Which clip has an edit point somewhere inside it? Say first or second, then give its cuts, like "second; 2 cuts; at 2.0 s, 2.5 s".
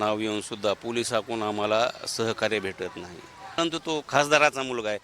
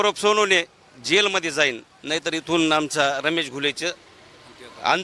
first; 1 cut; at 3.5 s